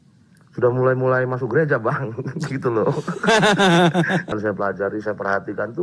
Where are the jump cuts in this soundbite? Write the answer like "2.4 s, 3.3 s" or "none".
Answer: 4.3 s